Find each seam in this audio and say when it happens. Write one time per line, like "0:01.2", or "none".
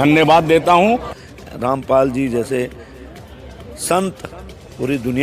0:01.2